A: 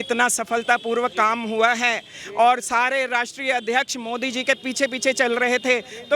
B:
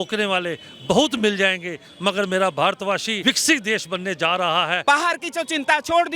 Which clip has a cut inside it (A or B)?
B